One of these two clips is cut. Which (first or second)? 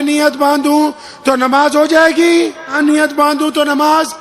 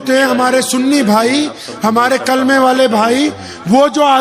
first